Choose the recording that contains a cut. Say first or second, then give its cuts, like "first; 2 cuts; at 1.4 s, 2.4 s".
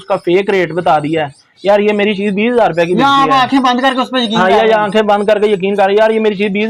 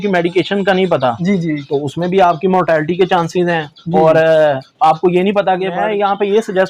second; 1 cut; at 5.7 s